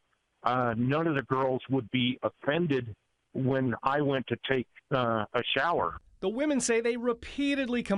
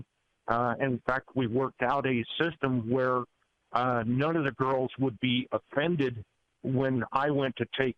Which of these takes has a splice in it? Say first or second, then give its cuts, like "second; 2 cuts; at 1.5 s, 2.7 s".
first; 1 cut; at 6.0 s